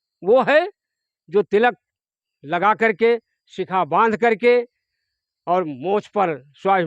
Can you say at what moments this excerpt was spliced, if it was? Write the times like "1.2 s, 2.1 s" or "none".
none